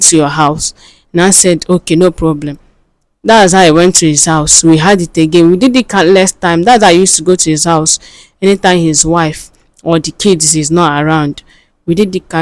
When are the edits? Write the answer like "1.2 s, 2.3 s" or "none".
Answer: none